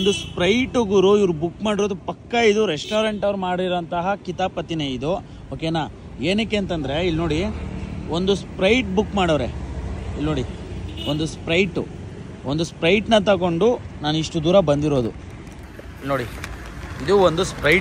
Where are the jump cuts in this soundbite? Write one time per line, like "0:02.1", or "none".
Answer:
none

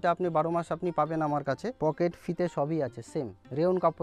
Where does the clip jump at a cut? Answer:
0:01.7

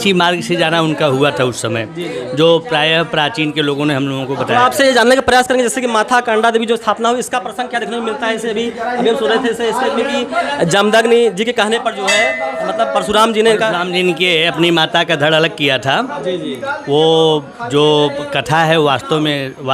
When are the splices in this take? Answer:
none

